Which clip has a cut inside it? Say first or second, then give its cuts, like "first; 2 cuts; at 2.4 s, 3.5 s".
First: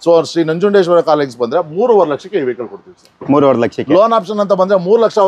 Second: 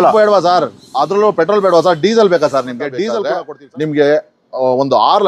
second; 1 cut; at 3.3 s